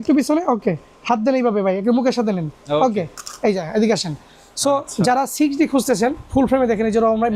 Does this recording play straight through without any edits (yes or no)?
yes